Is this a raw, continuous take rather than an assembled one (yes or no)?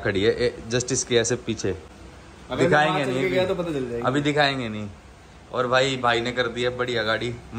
yes